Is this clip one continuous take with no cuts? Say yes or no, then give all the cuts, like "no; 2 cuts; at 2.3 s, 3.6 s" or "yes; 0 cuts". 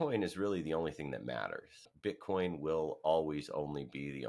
no; 1 cut; at 1.9 s